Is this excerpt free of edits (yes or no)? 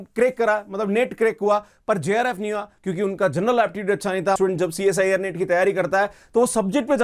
no